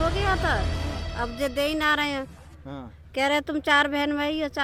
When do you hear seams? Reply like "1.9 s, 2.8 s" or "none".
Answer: none

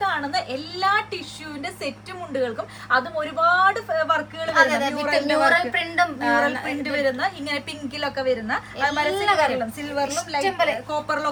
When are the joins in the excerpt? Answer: none

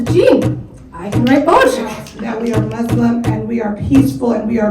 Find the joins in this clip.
2.1 s

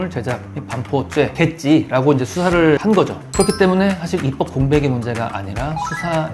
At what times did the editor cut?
1.3 s, 2.8 s

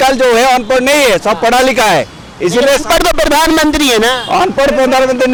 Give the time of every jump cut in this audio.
none

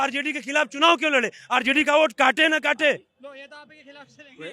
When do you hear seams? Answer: none

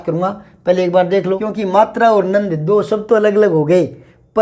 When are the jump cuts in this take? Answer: 1.4 s

